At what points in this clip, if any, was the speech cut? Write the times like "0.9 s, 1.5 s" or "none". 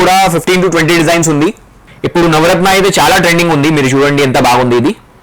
1.9 s